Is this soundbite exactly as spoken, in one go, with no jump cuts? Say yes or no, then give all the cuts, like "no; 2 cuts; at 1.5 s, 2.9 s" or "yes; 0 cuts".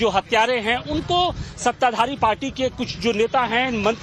no; 1 cut; at 1.9 s